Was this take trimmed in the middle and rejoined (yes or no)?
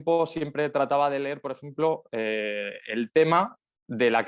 no